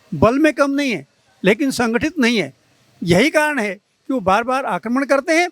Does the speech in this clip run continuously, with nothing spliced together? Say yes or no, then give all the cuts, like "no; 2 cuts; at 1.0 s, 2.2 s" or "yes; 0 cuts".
yes; 0 cuts